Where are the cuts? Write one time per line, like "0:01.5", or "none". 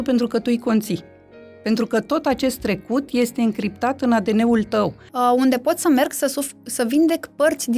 0:05.0